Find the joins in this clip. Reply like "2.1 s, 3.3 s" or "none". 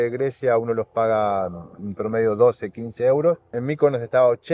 3.6 s